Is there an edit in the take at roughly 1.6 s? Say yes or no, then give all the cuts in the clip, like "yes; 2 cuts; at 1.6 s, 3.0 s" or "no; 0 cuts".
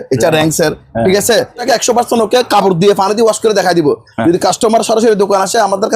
yes; 1 cut; at 1.6 s